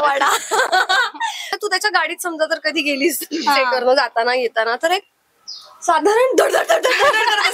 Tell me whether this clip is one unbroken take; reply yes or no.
no